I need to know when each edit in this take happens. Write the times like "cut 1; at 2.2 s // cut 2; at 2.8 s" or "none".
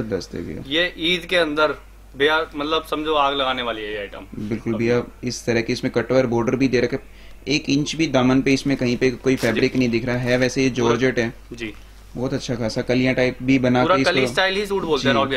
none